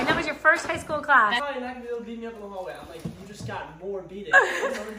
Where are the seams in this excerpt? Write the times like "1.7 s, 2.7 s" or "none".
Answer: 1.4 s